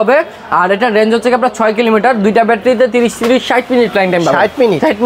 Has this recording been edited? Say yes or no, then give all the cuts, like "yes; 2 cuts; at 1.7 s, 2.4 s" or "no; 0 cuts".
no; 0 cuts